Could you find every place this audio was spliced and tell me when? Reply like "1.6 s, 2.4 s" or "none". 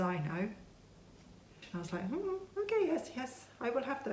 1.6 s